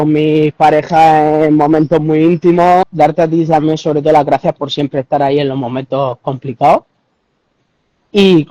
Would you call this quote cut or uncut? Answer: cut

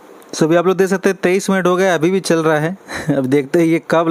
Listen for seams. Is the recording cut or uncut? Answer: uncut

